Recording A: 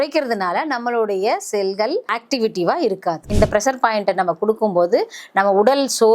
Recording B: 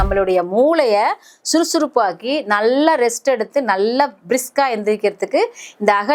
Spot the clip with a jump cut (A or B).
A